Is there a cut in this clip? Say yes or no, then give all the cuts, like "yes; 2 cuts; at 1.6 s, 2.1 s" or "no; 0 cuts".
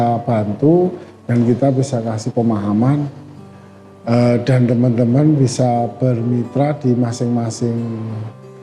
no; 0 cuts